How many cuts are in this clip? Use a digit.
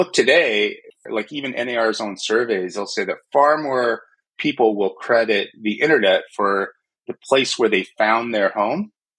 1